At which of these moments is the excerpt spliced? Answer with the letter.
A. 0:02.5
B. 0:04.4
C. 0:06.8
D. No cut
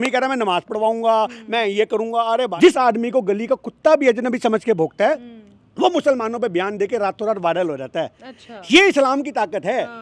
A